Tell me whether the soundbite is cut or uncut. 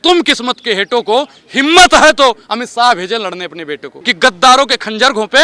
cut